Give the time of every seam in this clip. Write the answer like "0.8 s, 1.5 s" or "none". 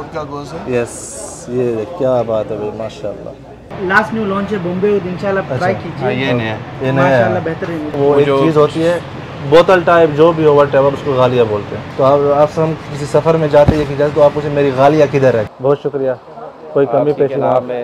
3.7 s, 8.0 s, 11.8 s, 15.5 s